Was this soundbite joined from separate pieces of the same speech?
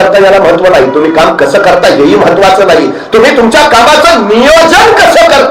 no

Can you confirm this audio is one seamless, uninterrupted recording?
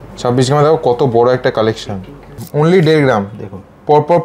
no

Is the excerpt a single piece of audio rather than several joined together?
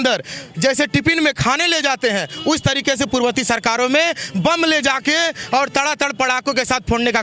yes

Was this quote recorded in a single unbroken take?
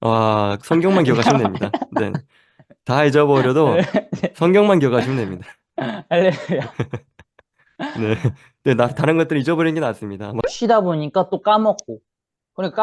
no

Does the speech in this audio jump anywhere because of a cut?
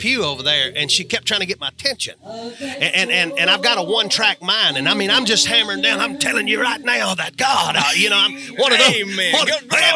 no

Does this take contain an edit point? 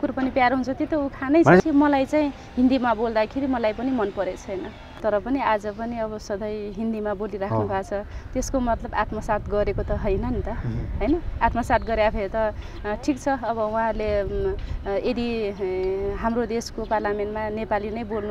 yes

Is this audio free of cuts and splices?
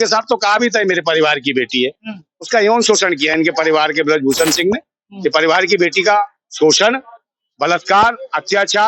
yes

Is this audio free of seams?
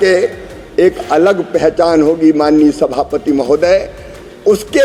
yes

